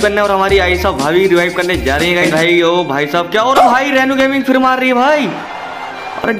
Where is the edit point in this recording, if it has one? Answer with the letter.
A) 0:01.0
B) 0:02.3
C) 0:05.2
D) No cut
B